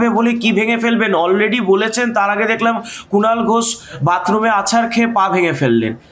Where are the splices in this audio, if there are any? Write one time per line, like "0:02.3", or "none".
none